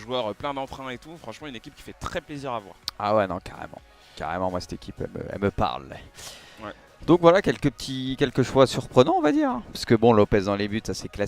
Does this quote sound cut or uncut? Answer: cut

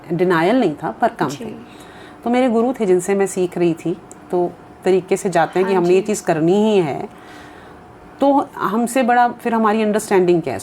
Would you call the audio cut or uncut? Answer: cut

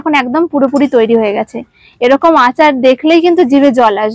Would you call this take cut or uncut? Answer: uncut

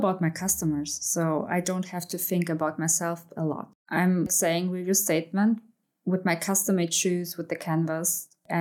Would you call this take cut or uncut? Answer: cut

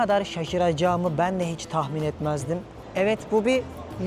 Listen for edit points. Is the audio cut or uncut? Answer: cut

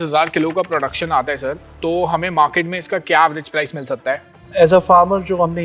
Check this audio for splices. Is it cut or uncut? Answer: uncut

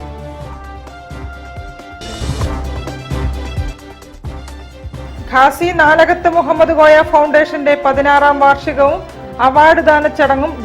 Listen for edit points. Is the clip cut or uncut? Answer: cut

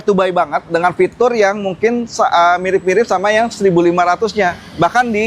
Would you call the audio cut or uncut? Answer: uncut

